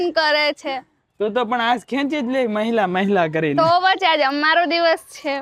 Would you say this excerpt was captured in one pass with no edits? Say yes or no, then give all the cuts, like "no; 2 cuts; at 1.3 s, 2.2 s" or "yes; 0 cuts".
yes; 0 cuts